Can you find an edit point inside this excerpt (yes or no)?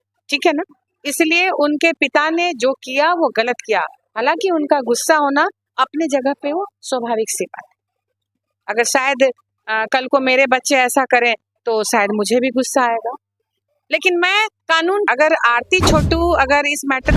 yes